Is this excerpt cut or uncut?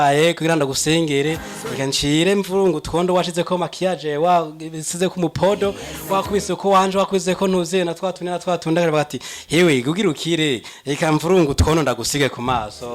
uncut